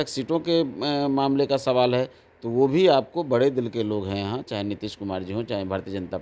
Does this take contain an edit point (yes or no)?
no